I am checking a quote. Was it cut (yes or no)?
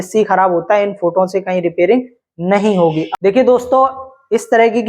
yes